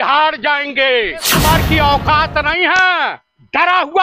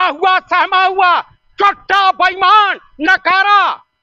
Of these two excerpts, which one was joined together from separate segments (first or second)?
first